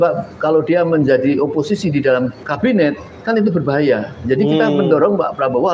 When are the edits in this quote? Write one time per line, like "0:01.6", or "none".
0:02.5